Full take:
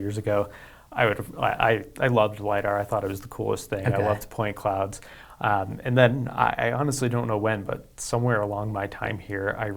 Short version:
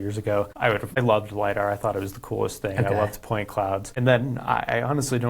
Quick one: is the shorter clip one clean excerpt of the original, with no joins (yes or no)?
no